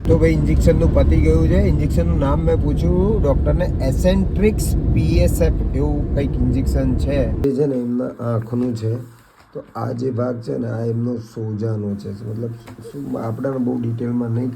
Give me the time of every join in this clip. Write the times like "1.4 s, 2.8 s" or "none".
7.4 s